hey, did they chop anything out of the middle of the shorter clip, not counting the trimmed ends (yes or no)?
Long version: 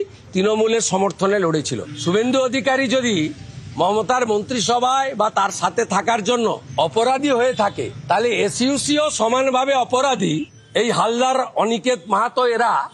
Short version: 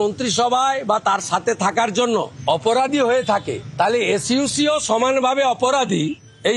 no